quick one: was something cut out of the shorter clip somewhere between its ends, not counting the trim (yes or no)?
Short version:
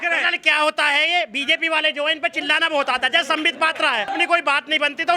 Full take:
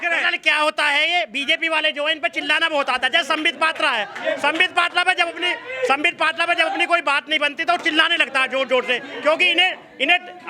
yes